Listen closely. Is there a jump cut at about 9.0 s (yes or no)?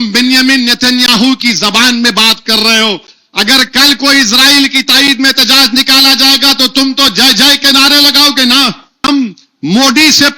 yes